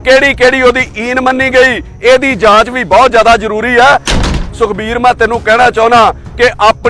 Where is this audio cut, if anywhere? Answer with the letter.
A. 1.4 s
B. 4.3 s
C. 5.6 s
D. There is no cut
B